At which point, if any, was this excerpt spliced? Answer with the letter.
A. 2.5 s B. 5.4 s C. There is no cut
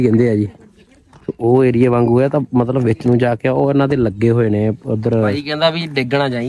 B